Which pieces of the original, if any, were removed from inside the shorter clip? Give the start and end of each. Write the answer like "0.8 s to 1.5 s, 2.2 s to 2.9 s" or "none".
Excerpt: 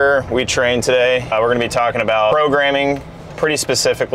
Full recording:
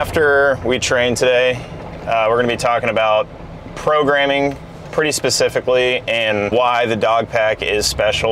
1.7 s to 2.2 s, 3.2 s to 3.9 s